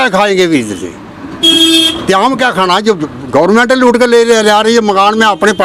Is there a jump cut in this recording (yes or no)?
no